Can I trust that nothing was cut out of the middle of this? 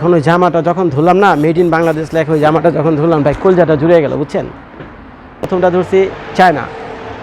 no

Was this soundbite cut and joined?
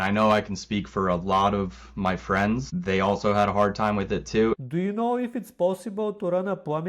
yes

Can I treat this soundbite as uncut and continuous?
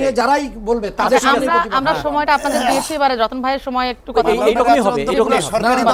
yes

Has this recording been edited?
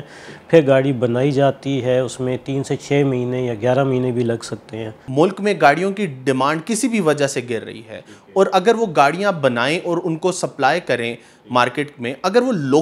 yes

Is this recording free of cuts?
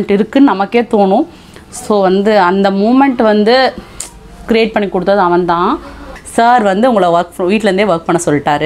no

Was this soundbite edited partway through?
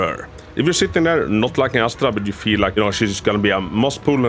yes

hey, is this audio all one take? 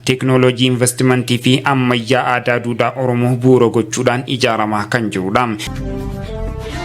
no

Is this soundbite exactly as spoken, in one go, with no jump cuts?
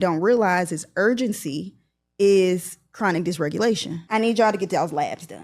no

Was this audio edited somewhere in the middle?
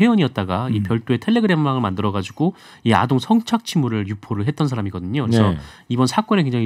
no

